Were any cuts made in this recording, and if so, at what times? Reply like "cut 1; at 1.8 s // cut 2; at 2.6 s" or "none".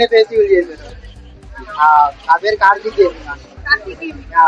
none